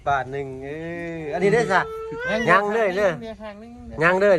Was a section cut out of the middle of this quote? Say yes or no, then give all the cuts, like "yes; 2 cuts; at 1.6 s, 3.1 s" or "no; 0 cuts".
no; 0 cuts